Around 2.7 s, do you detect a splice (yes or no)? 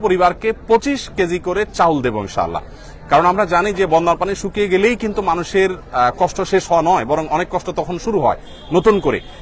no